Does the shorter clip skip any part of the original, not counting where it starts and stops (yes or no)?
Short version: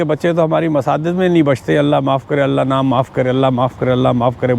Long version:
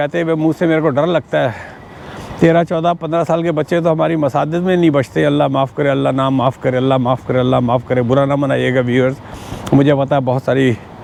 no